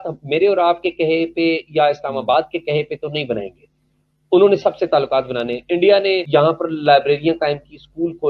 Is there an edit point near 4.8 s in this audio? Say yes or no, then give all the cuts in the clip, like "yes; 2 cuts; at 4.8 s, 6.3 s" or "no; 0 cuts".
no; 1 cut; at 6.2 s